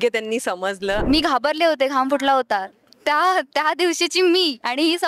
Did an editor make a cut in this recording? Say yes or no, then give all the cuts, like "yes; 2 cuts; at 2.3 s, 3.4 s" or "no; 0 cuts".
yes; 1 cut; at 1.0 s